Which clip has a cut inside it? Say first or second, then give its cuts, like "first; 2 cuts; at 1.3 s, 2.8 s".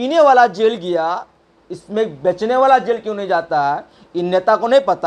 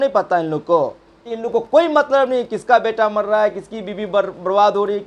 second; 1 cut; at 1.3 s